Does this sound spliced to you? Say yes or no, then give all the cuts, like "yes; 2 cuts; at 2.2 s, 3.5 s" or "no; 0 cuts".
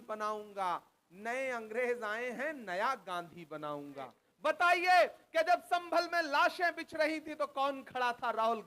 yes; 1 cut; at 4.2 s